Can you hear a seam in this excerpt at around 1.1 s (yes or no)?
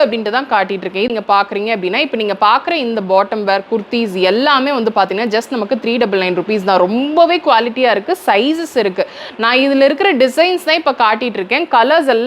yes